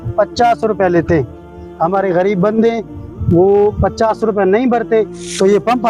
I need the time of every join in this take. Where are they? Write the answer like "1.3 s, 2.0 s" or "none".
none